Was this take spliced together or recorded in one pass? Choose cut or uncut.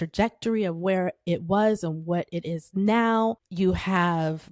cut